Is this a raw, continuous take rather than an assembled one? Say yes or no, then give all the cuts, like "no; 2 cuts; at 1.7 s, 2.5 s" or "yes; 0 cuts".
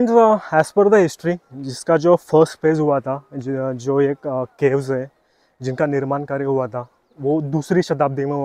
yes; 0 cuts